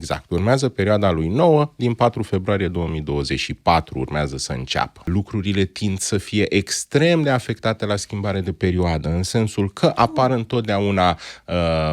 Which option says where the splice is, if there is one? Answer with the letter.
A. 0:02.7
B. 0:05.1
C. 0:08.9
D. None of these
B